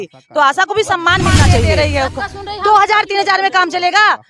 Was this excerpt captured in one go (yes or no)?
no